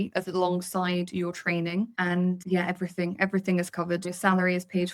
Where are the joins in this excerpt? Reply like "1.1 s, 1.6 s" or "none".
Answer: 2.2 s, 4.1 s